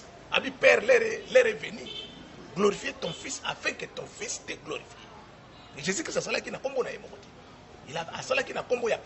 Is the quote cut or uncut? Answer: uncut